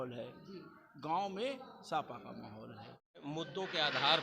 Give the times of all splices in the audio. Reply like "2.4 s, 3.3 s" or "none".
3.2 s